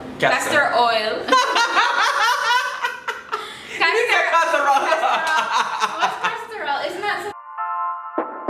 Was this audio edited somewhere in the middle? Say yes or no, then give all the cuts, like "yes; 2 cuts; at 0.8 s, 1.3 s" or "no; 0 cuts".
yes; 1 cut; at 7.3 s